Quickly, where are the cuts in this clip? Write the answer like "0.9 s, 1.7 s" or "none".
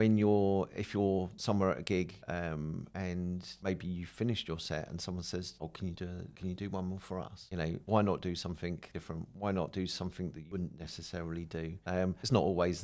none